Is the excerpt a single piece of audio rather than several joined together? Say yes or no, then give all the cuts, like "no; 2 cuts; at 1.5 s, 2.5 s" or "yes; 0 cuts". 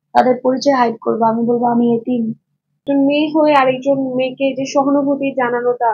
no; 1 cut; at 2.9 s